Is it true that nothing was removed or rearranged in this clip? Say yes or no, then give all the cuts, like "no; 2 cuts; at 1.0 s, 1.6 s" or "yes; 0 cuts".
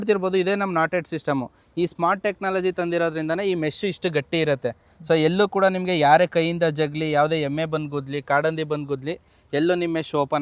yes; 0 cuts